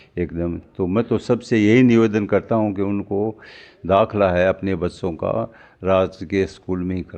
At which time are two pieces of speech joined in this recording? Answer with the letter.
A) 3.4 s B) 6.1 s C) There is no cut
C